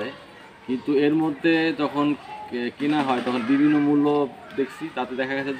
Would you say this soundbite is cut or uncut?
uncut